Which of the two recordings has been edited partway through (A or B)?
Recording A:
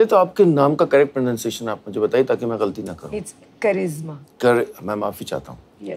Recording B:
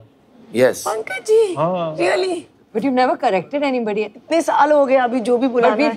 B